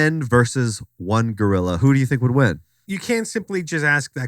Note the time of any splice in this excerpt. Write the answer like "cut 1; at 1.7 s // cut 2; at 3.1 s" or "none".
cut 1; at 1.8 s